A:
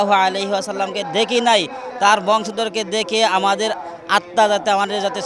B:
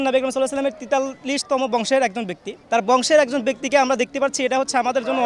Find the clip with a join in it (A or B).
B